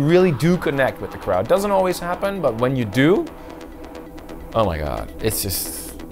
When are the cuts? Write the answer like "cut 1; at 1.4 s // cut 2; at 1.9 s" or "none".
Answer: none